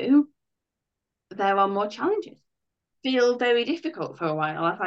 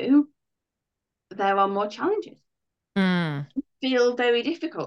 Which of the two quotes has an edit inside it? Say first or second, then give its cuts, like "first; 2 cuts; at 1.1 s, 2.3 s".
first; 1 cut; at 2.9 s